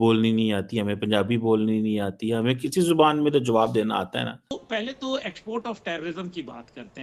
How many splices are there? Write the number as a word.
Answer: one